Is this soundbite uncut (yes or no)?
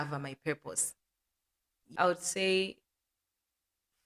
no